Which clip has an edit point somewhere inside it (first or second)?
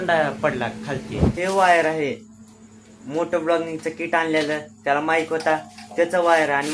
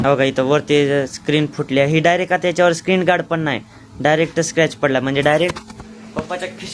first